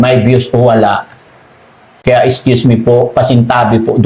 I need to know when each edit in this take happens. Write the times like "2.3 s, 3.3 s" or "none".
2.0 s

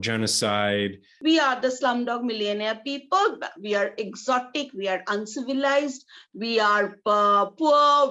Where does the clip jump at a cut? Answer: 1.1 s

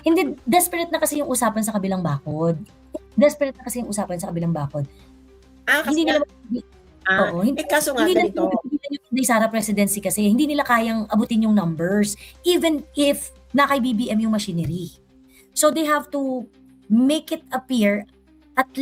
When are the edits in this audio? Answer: none

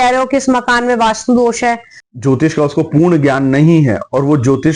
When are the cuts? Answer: 2.0 s

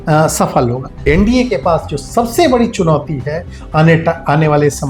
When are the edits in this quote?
1.0 s

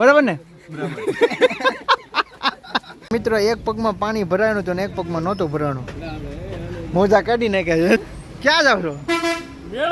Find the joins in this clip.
3.1 s, 8.0 s

